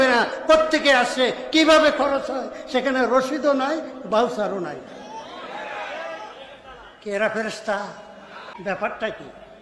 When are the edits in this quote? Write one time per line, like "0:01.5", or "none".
0:08.6